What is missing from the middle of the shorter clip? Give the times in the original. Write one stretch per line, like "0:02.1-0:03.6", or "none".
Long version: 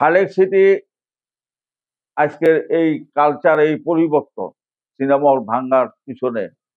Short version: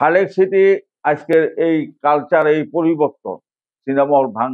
0:00.9-0:02.0